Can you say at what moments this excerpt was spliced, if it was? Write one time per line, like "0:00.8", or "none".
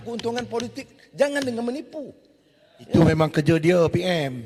none